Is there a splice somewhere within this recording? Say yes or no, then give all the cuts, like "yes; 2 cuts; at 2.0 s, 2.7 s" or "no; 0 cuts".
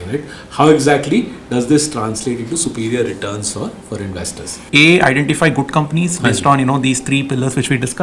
yes; 1 cut; at 4.6 s